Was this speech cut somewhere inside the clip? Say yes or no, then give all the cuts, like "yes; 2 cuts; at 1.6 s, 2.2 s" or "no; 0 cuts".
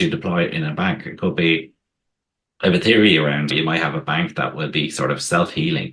no; 0 cuts